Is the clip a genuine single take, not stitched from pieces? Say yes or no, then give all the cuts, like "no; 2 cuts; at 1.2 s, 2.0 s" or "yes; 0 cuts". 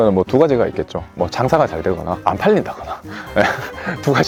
yes; 0 cuts